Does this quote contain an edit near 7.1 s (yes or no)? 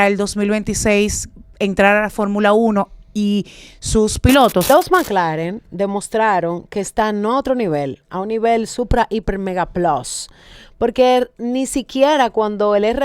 no